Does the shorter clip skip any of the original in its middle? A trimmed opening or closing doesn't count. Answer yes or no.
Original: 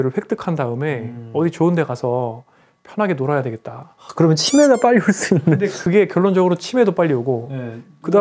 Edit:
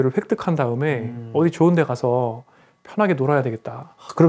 no